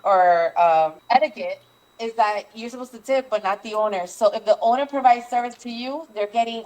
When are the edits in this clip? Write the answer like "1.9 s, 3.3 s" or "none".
1.0 s